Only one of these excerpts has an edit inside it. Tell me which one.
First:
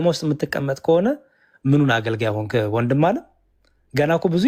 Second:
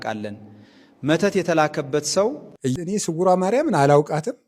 second; 1 cut; at 2.7 s

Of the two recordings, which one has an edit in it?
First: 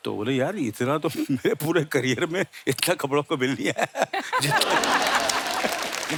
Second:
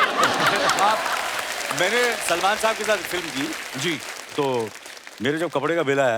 second; 1 cut; at 1.2 s

